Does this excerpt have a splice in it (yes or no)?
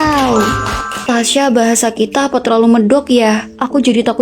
yes